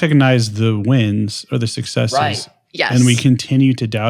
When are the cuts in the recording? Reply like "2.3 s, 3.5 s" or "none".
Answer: none